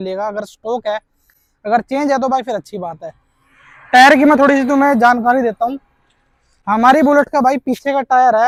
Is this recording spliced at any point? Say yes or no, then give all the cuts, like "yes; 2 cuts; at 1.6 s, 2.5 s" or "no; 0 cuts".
no; 0 cuts